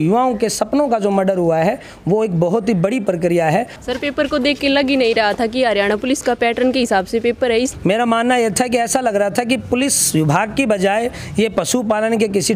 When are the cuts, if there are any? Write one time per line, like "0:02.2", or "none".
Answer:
0:03.8
0:07.7